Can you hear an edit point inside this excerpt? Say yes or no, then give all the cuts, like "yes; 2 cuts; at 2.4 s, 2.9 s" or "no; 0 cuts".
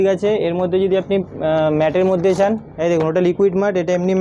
no; 0 cuts